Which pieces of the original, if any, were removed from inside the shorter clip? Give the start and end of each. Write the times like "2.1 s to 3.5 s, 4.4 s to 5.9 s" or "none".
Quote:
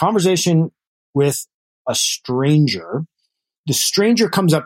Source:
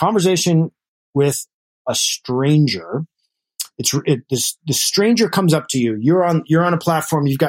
3.5 s to 4.5 s